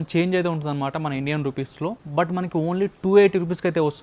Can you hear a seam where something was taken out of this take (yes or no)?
no